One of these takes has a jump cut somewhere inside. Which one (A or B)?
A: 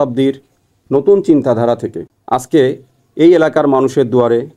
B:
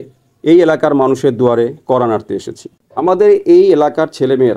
B